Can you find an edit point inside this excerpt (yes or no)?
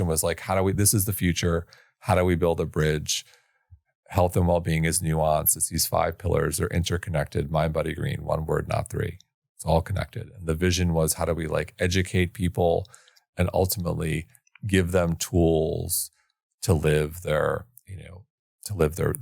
no